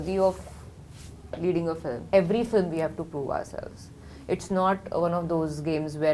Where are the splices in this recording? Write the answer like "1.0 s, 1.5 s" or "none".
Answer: 2.1 s